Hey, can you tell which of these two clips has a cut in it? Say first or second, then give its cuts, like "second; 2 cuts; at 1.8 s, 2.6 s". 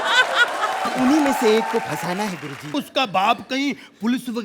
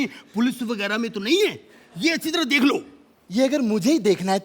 first; 1 cut; at 2.7 s